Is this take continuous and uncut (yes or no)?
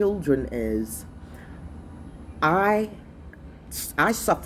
yes